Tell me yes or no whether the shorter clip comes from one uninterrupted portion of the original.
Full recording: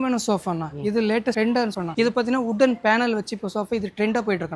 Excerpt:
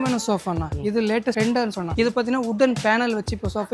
yes